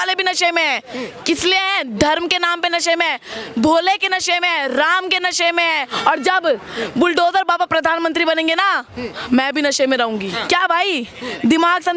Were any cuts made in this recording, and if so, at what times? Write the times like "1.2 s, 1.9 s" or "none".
5.9 s, 10.3 s